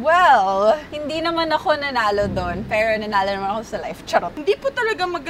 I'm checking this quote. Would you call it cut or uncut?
cut